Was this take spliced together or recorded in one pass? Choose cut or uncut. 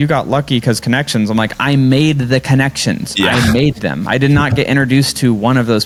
uncut